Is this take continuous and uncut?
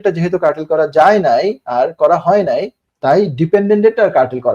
yes; 0 cuts

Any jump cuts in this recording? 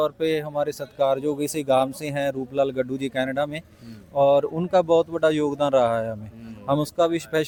no; 0 cuts

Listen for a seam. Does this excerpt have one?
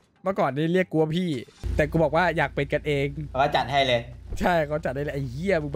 yes; 2 cuts; at 1.6 s, 3.2 s

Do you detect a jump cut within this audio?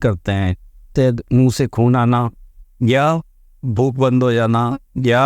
yes; 1 cut; at 0.9 s

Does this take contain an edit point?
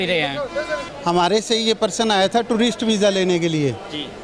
yes; 1 cut; at 0.9 s

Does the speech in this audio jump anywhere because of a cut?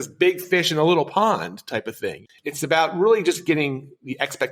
yes; 1 cut; at 2.2 s

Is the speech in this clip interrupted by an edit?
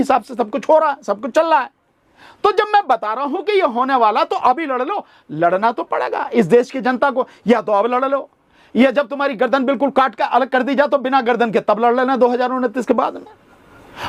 no; 0 cuts

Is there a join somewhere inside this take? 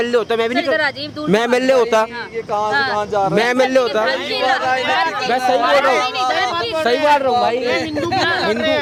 no; 0 cuts

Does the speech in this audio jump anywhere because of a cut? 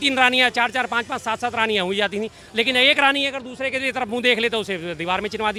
no; 0 cuts

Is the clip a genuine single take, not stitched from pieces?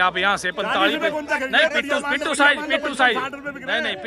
yes; 0 cuts

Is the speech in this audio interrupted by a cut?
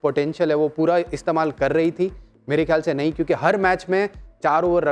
no; 0 cuts

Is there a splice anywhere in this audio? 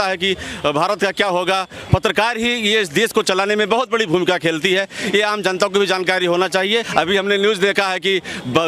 yes; 2 cuts; at 1.7 s, 6.9 s

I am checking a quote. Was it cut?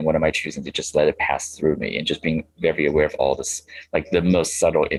no; 0 cuts

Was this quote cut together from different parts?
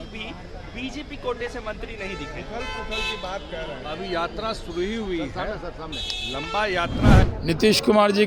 yes; 1 cut; at 7.3 s

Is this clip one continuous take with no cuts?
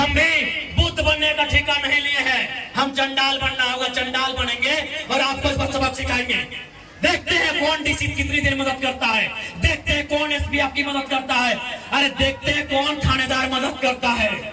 yes; 0 cuts

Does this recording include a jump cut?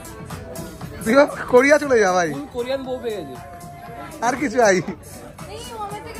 no; 0 cuts

